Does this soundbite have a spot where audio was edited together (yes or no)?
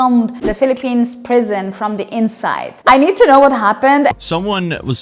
yes